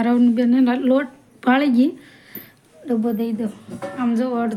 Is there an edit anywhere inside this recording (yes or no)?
no